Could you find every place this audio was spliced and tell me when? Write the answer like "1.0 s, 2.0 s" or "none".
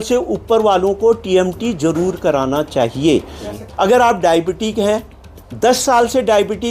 3.4 s